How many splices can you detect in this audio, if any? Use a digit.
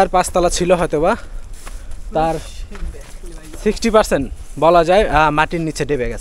0